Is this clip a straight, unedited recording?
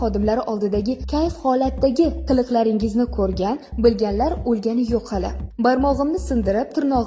yes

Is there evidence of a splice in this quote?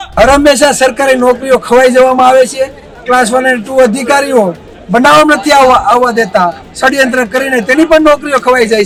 no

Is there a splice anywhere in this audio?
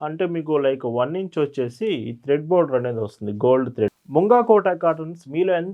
yes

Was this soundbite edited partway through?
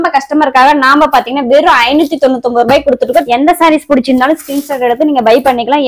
yes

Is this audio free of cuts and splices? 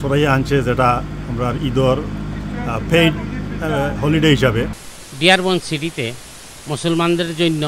no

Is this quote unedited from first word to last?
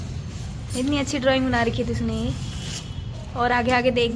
yes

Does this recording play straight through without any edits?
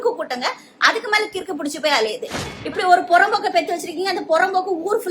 no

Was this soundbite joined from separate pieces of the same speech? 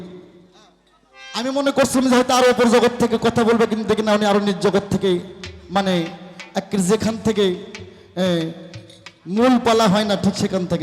no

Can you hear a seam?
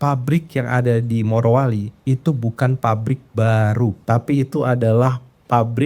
yes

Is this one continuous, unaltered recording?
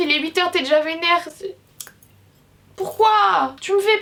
yes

